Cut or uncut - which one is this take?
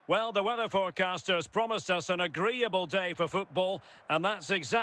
uncut